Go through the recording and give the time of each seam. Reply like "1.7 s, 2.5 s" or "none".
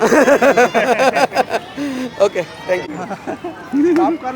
none